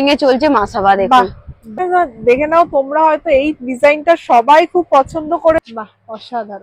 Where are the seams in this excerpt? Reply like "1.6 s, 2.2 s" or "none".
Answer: 1.7 s, 5.6 s